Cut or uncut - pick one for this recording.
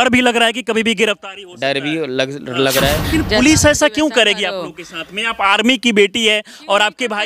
cut